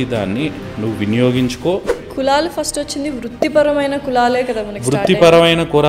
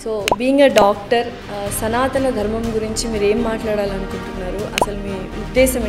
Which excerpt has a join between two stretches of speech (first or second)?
first